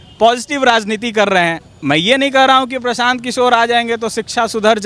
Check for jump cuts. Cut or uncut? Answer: uncut